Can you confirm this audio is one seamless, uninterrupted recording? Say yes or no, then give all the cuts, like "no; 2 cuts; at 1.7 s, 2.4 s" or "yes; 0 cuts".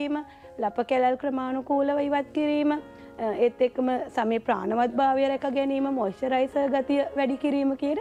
yes; 0 cuts